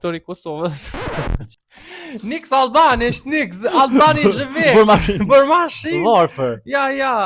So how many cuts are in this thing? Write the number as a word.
one